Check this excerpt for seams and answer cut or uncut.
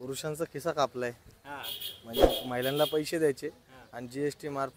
uncut